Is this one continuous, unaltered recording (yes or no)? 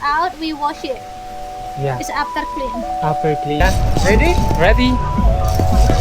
no